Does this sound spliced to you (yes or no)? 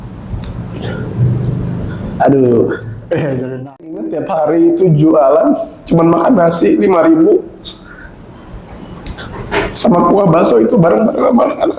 yes